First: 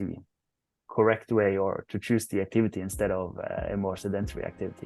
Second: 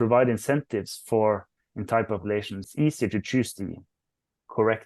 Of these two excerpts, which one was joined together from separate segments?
second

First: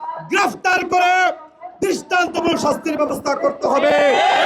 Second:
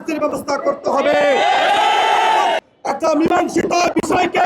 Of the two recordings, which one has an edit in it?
second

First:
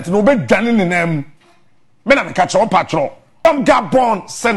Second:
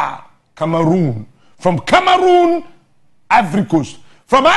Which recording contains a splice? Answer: first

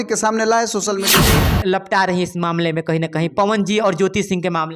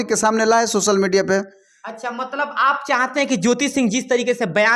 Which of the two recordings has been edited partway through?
first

